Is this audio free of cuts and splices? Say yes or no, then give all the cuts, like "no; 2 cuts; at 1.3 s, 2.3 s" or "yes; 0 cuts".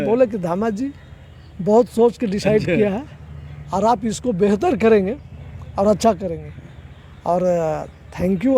yes; 0 cuts